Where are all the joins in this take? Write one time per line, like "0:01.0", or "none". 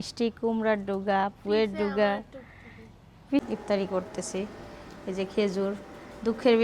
0:03.4